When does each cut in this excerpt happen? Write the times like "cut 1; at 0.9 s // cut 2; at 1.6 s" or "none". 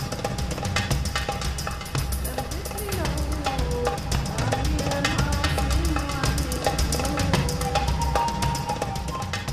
cut 1; at 4.1 s